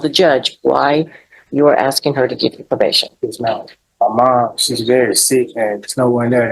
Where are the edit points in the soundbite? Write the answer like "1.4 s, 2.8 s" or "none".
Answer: 3.8 s